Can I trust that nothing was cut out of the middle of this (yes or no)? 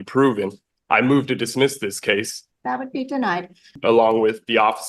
no